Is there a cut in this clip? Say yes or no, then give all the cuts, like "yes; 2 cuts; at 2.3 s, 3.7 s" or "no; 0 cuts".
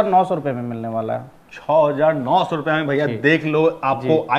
no; 0 cuts